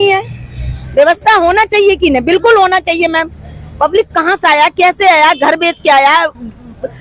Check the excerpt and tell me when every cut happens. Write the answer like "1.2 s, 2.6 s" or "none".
none